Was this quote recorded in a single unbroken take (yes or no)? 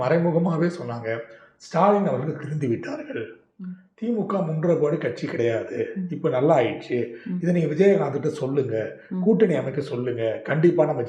yes